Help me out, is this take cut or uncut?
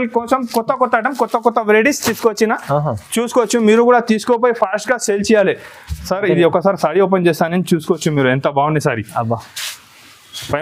uncut